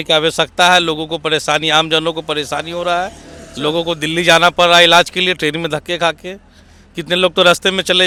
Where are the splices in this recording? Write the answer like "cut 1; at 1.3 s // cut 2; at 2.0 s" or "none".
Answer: none